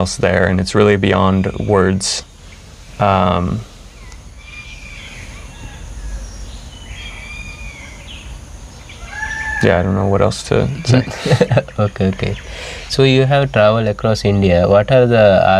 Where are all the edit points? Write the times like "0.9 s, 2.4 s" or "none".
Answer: none